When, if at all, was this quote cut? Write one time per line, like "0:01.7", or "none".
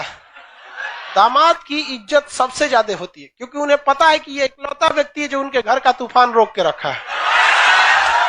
0:01.0